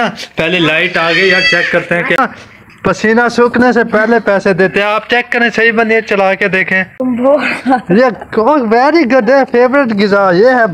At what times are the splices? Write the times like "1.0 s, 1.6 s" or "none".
2.2 s, 7.0 s